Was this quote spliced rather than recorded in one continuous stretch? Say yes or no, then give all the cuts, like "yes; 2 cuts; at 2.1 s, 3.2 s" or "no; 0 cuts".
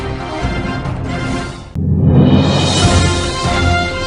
no; 0 cuts